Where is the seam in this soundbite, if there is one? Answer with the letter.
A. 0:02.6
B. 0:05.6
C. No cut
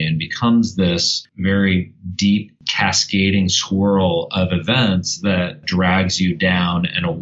B